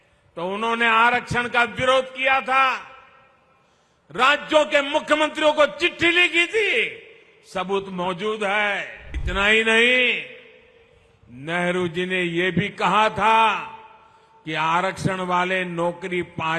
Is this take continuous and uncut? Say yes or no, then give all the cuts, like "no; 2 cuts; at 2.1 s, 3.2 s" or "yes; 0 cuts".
no; 1 cut; at 9.2 s